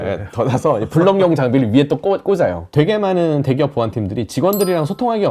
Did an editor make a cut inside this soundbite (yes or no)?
yes